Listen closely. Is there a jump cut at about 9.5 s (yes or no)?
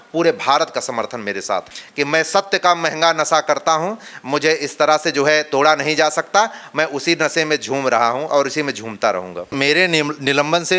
yes